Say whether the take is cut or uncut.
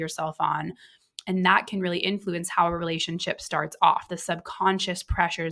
uncut